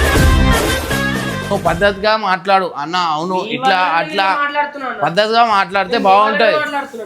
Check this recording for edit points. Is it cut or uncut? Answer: cut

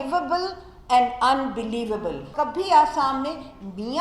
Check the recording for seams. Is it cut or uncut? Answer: cut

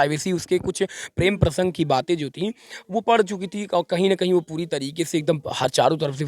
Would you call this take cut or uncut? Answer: uncut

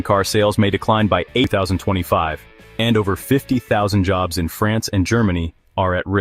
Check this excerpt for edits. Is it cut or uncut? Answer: cut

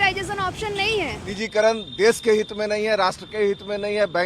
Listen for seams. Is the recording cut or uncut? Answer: cut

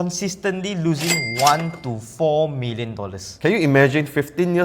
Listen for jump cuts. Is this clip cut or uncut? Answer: cut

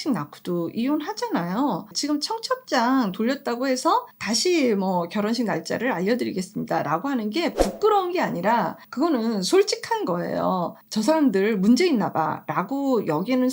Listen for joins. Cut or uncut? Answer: cut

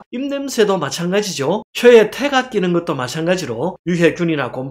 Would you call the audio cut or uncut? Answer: cut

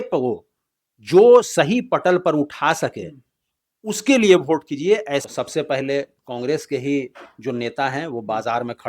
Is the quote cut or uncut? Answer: cut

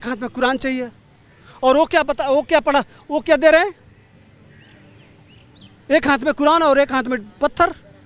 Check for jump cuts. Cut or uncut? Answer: uncut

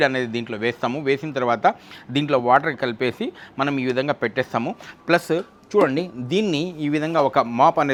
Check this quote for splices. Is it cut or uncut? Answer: uncut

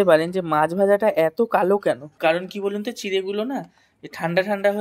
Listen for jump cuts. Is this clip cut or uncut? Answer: cut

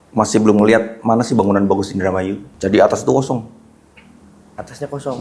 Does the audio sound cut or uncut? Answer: cut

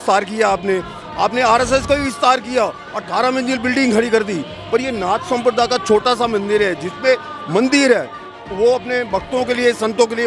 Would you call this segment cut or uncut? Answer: uncut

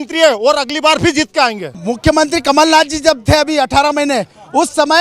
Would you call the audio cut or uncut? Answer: cut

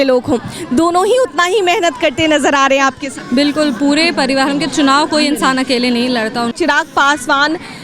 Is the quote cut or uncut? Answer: cut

